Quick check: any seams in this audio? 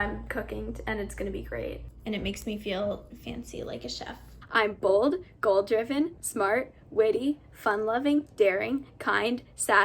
yes; 2 cuts; at 2.0 s, 4.3 s

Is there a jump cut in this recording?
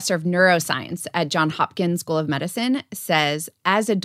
no; 0 cuts

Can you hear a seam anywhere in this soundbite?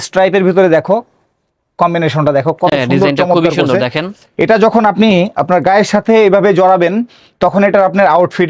no; 0 cuts

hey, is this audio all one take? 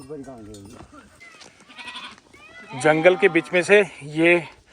no; 1 cut; at 1.2 s

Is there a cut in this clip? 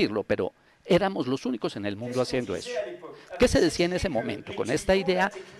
no; 0 cuts

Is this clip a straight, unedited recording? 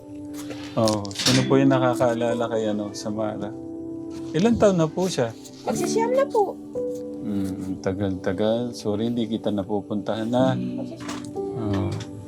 no; 1 cut; at 11.0 s

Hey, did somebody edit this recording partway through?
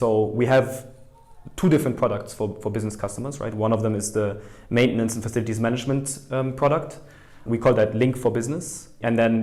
no; 0 cuts

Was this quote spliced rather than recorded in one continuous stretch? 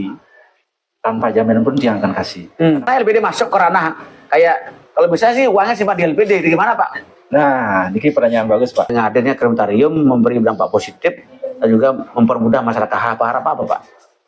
yes; 2 cuts; at 2.8 s, 8.9 s

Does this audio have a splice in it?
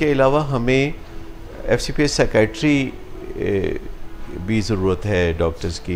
no; 0 cuts

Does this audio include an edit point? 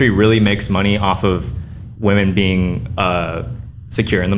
no; 0 cuts

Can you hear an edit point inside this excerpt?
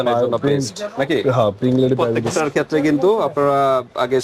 yes; 1 cut; at 2.2 s

